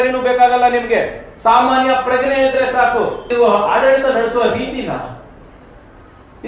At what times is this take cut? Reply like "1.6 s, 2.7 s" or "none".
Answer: 3.2 s